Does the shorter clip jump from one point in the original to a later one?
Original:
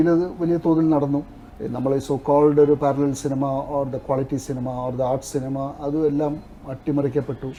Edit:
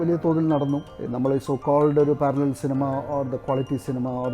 yes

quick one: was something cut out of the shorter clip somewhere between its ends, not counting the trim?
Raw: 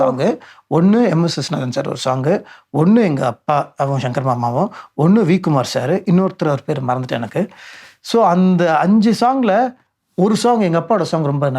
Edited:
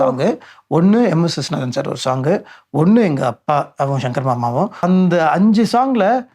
yes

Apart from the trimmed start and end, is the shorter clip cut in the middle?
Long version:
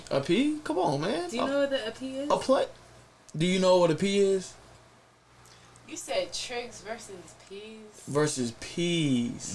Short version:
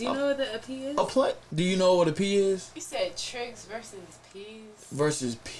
yes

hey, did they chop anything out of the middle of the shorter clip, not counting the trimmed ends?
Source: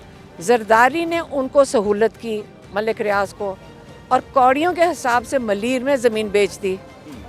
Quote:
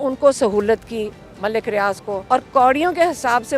yes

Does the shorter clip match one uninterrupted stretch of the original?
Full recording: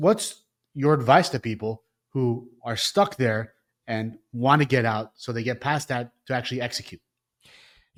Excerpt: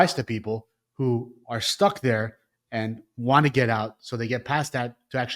yes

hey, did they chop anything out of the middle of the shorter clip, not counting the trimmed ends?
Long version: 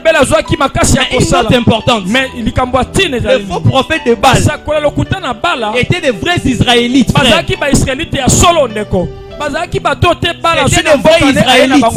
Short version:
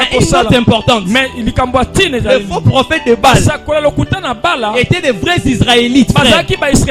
no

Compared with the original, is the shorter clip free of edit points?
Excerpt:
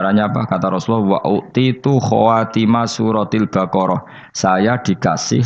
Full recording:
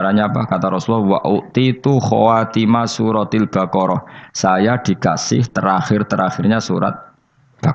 yes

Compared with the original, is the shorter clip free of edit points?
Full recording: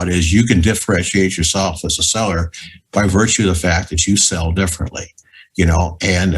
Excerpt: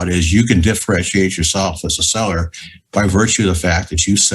yes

